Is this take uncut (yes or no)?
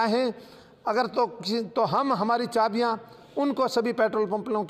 yes